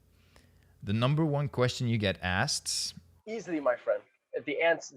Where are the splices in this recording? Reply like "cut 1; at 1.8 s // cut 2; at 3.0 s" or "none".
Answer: cut 1; at 3.1 s